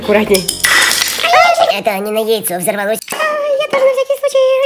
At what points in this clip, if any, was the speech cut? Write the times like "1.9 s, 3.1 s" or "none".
1.7 s, 3.1 s